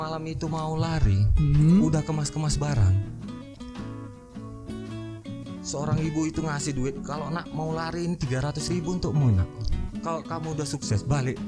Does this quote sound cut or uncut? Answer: uncut